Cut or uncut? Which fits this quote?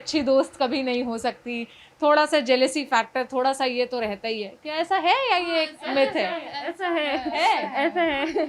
uncut